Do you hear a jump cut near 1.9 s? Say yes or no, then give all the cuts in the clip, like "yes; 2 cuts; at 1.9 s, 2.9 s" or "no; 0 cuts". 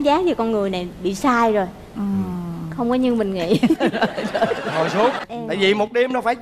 no; 1 cut; at 5.2 s